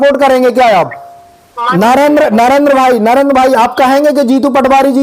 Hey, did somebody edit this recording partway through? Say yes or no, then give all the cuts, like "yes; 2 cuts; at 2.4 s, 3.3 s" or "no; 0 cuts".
yes; 1 cut; at 1.6 s